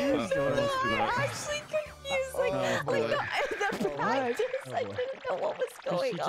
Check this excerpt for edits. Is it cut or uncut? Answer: uncut